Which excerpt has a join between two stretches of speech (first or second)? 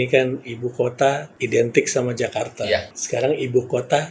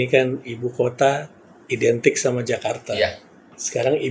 first